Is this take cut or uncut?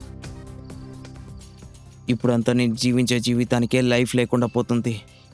cut